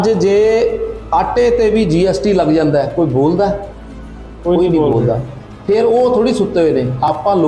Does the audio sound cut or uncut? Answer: uncut